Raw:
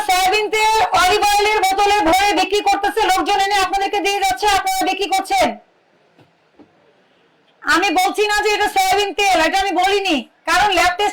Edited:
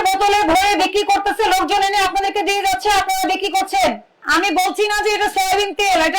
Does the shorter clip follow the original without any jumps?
no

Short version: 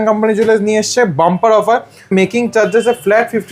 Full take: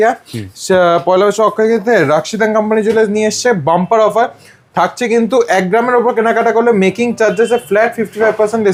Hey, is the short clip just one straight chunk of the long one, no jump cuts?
no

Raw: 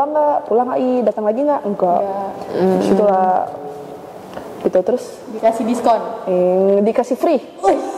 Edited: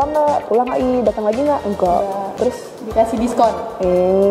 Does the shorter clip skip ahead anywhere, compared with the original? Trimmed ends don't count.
yes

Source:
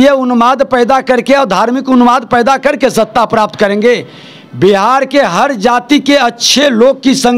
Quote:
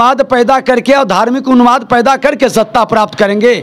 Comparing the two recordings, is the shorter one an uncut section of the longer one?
yes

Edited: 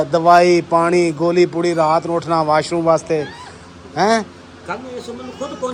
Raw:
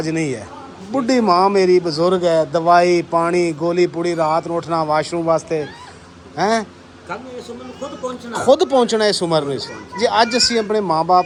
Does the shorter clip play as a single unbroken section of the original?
yes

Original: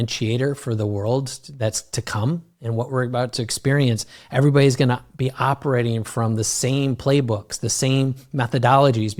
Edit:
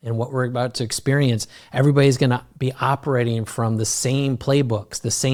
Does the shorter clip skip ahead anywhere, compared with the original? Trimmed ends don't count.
no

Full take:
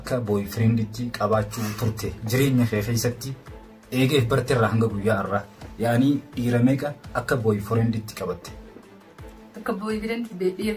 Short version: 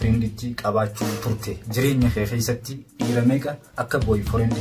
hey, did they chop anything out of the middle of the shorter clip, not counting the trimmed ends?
yes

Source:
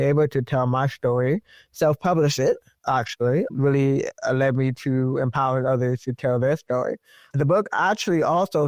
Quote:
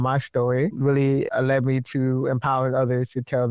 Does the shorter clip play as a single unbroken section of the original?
no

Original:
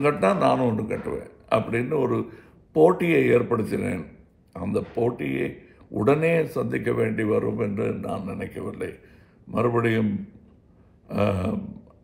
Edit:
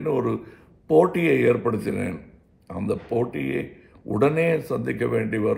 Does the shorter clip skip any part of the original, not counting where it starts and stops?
no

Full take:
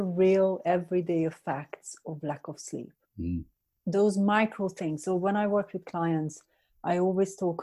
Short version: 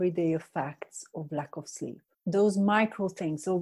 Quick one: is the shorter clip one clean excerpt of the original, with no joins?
no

